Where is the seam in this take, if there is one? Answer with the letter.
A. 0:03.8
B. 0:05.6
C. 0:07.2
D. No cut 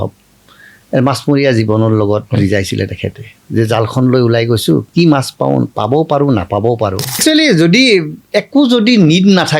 C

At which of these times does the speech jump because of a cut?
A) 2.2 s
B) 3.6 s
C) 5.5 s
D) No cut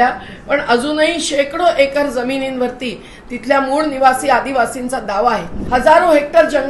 C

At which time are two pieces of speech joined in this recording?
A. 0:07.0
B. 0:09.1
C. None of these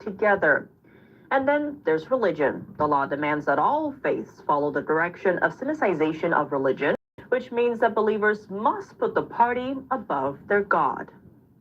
A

